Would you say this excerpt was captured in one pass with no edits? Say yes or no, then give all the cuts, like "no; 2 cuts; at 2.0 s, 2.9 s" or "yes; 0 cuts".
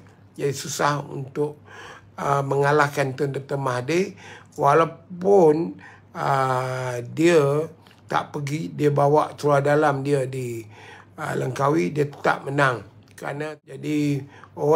no; 1 cut; at 13.3 s